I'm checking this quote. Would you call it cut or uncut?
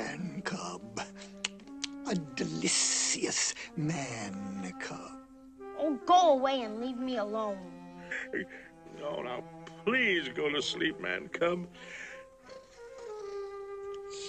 cut